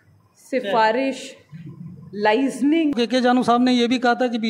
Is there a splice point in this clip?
yes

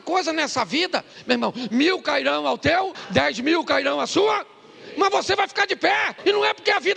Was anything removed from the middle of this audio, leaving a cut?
yes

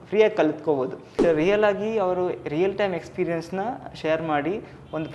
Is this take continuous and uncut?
no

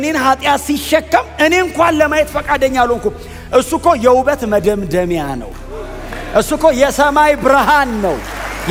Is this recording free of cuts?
yes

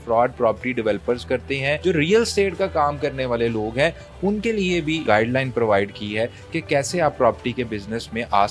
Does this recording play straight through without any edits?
no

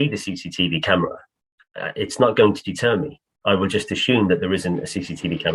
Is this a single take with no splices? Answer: yes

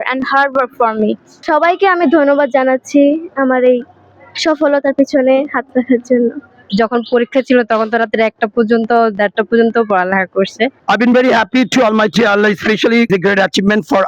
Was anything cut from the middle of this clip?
yes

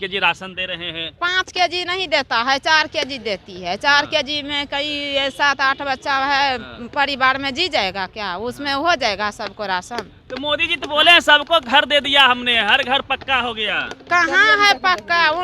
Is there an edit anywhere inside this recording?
yes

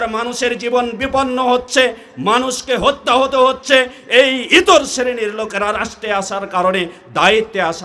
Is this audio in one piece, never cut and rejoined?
yes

